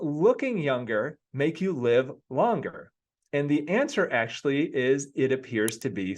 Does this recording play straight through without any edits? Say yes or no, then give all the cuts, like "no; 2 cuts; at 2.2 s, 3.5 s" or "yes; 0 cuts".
no; 1 cut; at 1.2 s